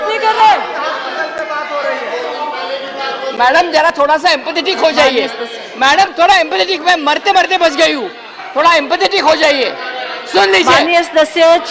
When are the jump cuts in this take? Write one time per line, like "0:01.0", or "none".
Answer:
none